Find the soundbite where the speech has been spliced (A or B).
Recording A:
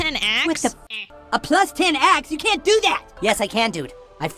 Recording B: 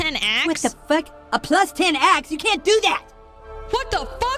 A